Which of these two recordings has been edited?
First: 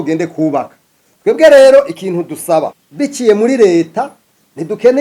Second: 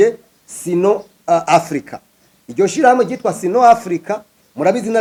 first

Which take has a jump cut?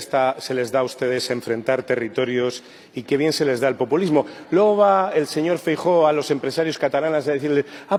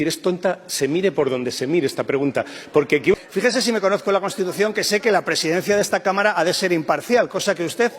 second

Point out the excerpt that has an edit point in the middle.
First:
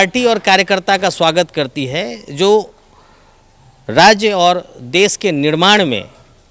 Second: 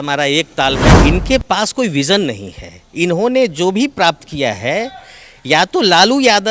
second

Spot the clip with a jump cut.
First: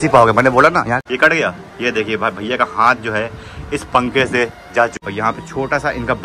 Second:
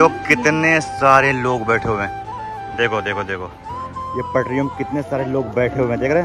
first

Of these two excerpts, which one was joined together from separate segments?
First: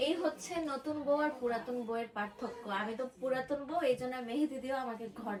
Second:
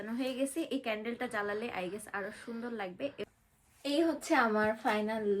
second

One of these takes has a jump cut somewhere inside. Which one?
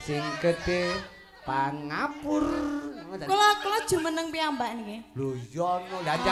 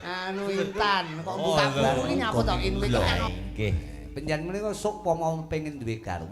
second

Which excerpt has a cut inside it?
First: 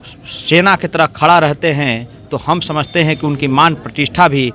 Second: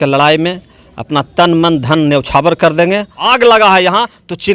second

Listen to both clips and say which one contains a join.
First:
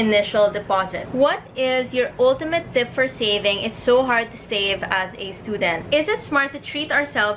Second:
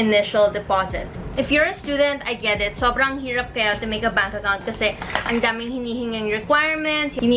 first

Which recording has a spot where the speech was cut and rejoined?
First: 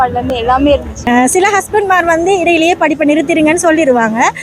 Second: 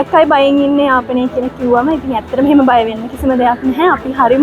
first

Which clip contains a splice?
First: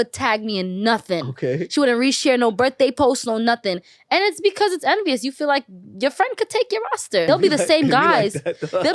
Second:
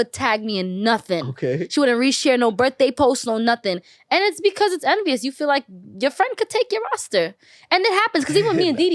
first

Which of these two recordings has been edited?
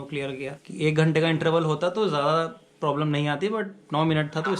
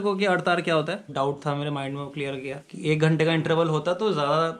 second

